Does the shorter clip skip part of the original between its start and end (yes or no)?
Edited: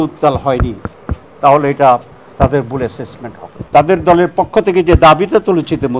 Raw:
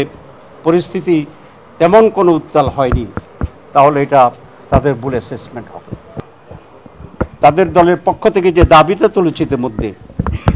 yes